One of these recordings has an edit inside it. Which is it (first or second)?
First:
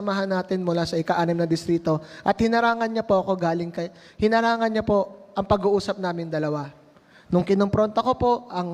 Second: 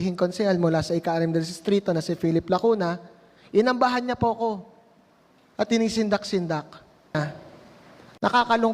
second